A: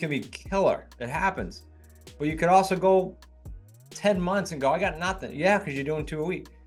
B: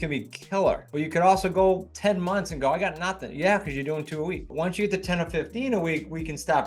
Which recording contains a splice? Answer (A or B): B